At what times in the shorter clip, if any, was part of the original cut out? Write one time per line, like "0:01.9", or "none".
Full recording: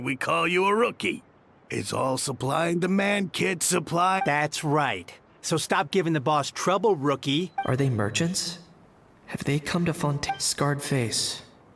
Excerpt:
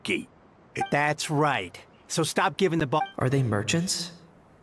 0:00.9
0:03.0